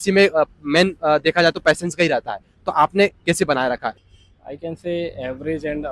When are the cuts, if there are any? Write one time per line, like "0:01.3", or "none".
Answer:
0:04.0